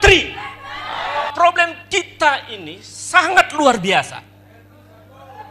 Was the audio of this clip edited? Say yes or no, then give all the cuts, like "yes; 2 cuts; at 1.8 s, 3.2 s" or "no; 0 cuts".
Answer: yes; 1 cut; at 1.3 s